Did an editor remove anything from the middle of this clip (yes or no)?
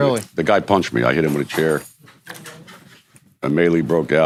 no